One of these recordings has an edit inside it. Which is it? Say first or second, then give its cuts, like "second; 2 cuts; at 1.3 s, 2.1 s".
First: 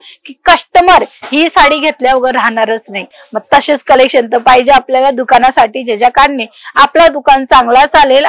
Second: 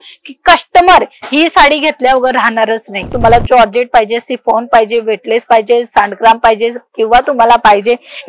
second; 1 cut; at 3.1 s